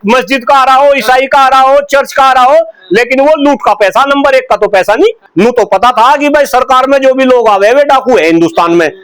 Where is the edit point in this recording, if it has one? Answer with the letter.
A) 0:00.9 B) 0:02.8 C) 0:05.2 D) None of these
C